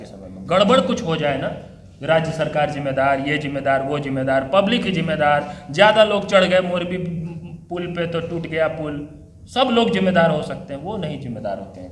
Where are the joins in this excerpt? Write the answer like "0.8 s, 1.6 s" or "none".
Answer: none